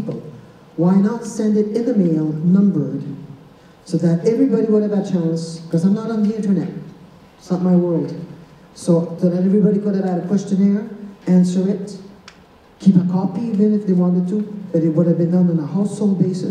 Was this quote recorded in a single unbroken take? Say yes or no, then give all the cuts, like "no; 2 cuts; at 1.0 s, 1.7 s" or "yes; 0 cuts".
yes; 0 cuts